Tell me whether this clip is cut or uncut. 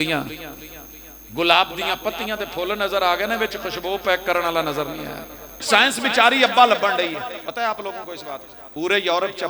cut